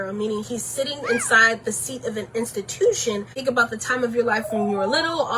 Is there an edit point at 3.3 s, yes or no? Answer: yes